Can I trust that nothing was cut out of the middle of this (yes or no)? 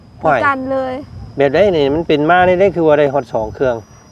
yes